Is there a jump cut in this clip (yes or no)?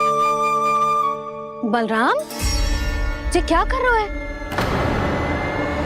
no